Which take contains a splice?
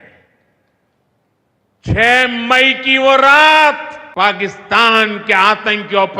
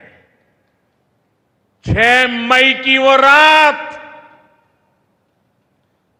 first; 1 cut; at 4.0 s

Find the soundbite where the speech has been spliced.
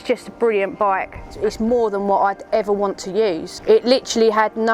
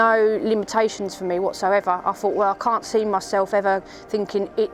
first; 2 cuts; at 1.2 s, 3.5 s

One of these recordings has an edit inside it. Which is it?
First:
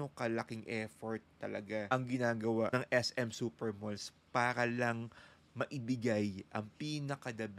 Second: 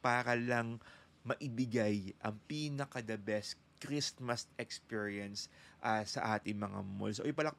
first; 2 cuts; at 1.9 s, 2.7 s

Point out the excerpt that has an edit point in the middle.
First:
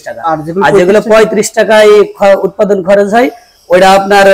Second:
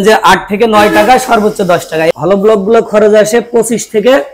second; 1 cut; at 2.1 s

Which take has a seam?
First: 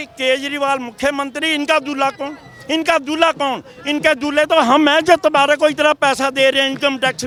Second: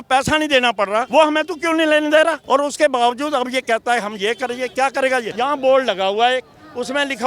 second; 3 cuts; at 1.1 s, 2.4 s, 5.3 s

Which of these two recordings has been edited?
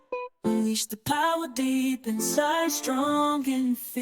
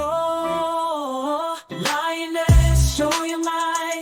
first; 1 cut; at 2.1 s

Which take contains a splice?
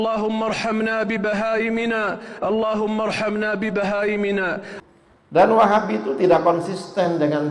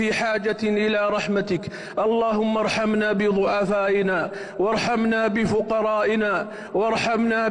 first; 1 cut; at 4.7 s

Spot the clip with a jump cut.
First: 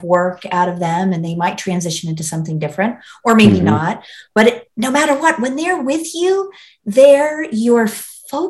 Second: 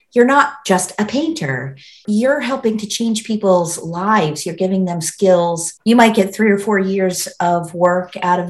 second; 2 cuts; at 2.0 s, 5.7 s

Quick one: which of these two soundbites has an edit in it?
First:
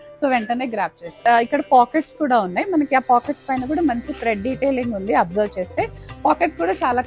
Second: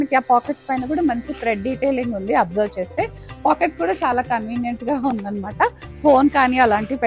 first; 1 cut; at 1.2 s

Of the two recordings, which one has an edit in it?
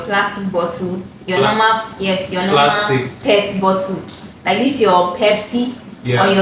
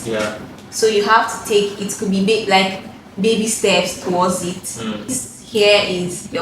second; 1 cut; at 5.2 s

